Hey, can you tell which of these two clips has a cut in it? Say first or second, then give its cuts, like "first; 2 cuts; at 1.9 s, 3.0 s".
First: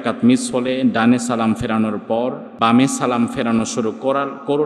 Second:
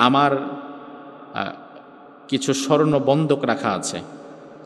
first; 1 cut; at 2.5 s